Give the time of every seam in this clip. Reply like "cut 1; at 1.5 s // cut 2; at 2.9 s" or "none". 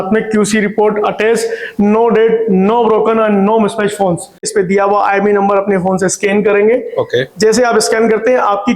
cut 1; at 4.5 s

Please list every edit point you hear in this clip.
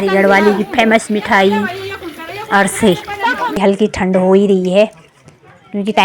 cut 1; at 3.6 s

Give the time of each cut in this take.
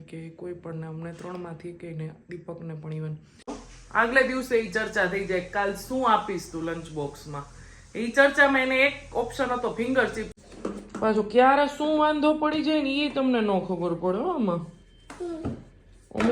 cut 1; at 3.6 s // cut 2; at 10.3 s

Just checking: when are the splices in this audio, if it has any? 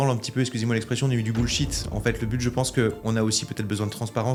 none

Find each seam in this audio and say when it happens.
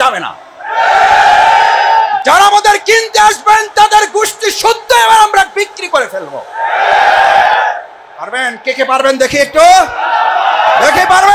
none

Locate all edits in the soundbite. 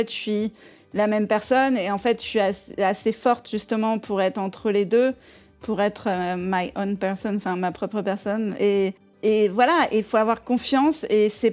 cut 1; at 9.1 s

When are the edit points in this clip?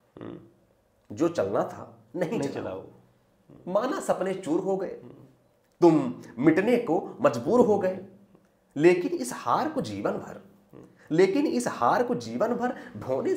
none

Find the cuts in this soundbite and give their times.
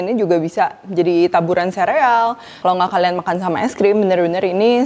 cut 1; at 2.5 s

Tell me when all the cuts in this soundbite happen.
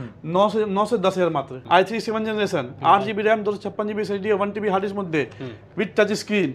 cut 1; at 1.5 s

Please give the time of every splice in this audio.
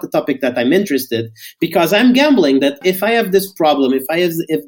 cut 1; at 2.8 s

